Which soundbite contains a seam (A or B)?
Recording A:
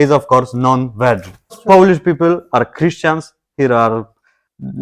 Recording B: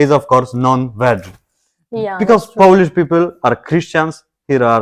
A